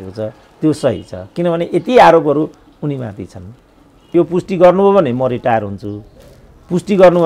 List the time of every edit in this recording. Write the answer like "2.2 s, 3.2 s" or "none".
4.0 s

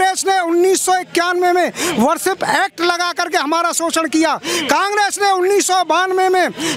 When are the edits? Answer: none

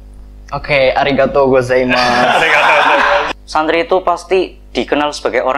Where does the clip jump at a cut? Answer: 3.3 s

